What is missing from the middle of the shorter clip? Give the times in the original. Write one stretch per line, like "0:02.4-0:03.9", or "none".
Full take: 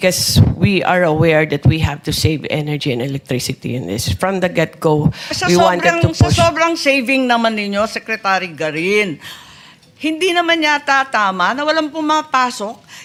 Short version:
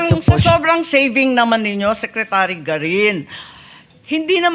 none